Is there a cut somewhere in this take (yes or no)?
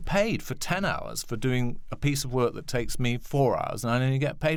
no